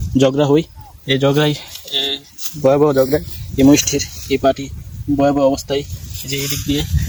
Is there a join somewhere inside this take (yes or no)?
no